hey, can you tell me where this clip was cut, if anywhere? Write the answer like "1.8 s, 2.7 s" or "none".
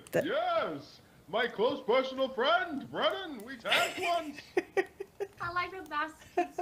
5.4 s